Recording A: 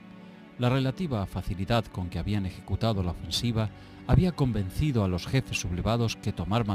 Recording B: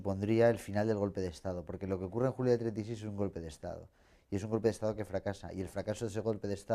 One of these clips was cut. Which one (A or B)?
A